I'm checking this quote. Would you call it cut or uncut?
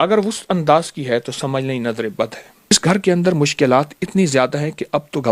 cut